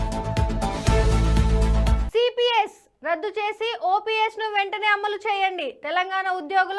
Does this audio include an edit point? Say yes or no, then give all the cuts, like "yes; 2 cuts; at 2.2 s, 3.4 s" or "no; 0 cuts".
yes; 1 cut; at 2.0 s